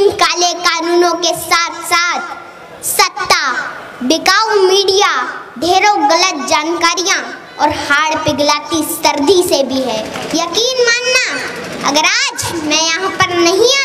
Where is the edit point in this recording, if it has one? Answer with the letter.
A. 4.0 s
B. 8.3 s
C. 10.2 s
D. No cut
C